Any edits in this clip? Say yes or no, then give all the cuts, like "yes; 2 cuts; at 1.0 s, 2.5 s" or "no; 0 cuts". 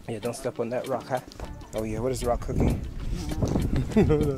yes; 1 cut; at 1.5 s